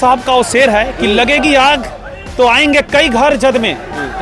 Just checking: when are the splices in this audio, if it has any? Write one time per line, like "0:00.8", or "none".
none